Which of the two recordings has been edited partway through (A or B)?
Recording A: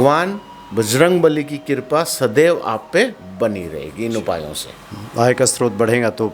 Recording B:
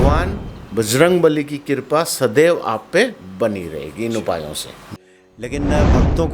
B